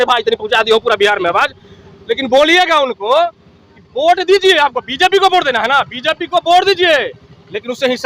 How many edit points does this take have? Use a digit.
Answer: 0